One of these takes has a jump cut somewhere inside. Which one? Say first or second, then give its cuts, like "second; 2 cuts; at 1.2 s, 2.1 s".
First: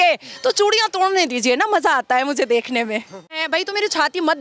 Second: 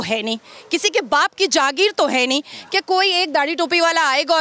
first; 1 cut; at 3.4 s